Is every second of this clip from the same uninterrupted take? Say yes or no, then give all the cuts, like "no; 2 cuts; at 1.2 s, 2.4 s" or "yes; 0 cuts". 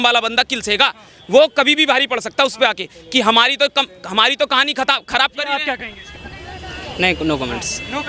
yes; 0 cuts